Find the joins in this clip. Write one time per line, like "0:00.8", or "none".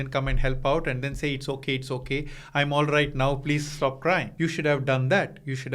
0:04.3